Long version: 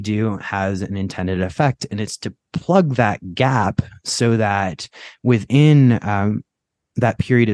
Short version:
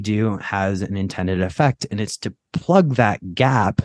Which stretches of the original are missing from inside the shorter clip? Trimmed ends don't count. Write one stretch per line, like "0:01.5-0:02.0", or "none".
none

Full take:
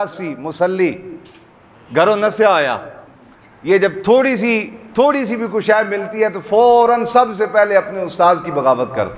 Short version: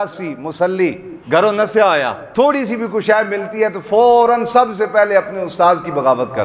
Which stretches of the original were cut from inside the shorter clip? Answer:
0:01.1-0:01.7
0:02.8-0:04.8

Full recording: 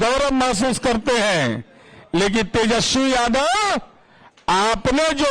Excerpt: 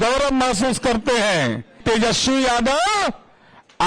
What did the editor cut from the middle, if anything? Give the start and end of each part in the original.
0:01.8-0:02.5

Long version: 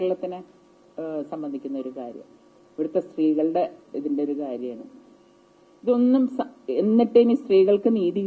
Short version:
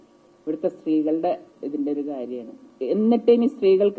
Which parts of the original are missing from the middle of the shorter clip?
0:05.0-0:06.5

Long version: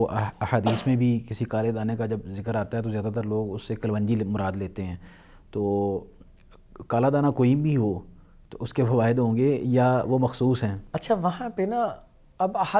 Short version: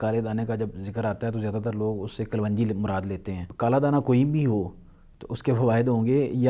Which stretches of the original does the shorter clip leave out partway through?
0:04.9-0:06.7

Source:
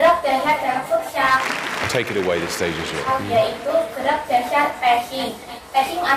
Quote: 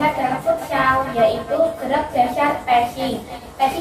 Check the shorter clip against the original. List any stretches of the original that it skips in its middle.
0:01.5-0:03.2

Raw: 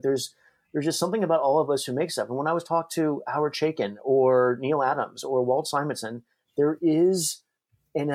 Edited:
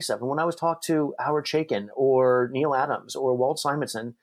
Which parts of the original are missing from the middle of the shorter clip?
none

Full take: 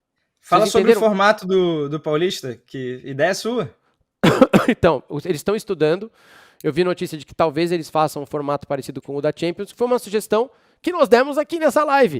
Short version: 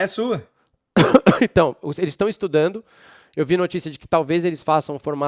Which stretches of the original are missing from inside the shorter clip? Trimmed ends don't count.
none

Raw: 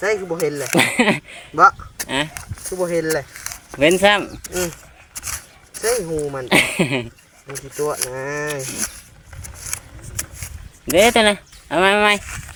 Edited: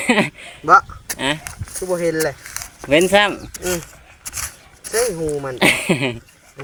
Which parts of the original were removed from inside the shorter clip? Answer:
none

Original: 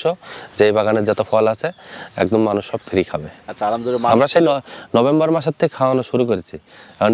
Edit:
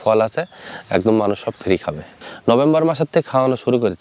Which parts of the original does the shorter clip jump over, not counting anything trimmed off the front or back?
0:03.5-0:04.7

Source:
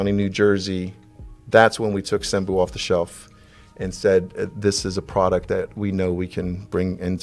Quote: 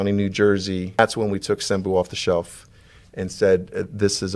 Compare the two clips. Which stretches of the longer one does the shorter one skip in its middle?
0:01.0-0:01.6

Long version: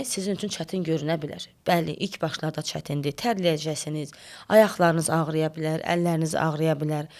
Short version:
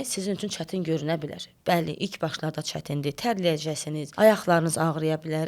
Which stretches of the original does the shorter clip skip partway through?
0:04.0-0:04.3

